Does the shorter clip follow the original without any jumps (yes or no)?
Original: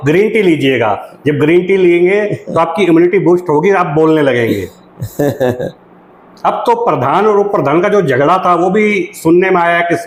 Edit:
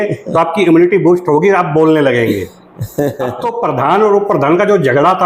no